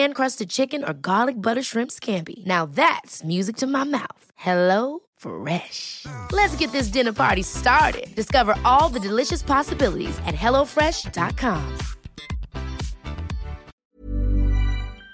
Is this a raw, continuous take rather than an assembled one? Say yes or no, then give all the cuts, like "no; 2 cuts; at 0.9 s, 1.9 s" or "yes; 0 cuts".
no; 1 cut; at 13.7 s